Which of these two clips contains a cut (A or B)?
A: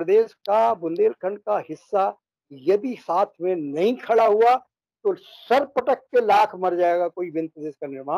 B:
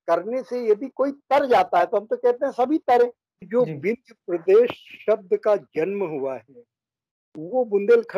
B